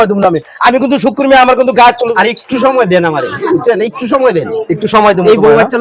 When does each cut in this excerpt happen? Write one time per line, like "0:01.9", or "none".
0:02.1